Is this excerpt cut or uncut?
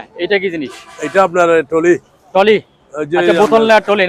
uncut